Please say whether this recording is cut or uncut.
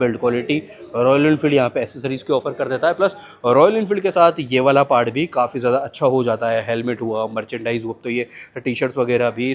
uncut